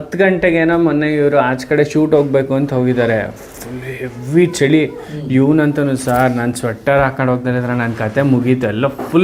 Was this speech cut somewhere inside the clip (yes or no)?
no